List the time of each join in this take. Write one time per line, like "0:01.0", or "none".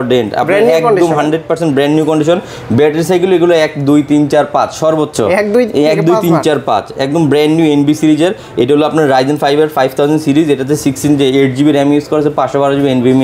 none